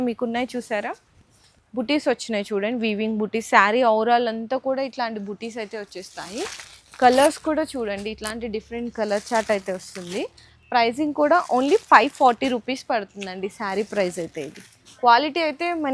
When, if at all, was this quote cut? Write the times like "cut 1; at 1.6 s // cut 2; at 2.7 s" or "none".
none